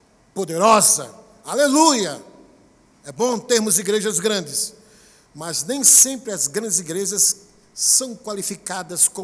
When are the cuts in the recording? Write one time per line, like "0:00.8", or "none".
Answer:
none